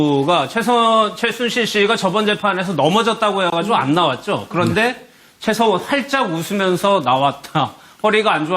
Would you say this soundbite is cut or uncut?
cut